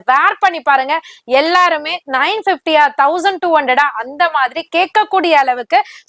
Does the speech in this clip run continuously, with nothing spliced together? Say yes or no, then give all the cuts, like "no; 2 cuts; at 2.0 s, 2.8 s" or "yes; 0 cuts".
yes; 0 cuts